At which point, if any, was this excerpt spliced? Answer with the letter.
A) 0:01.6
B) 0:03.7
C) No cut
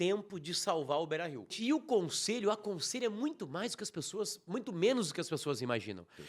A